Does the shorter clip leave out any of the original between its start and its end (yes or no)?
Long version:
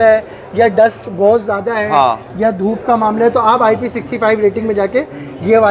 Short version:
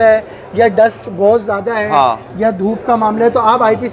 no